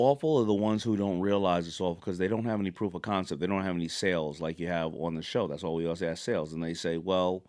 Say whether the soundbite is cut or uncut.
uncut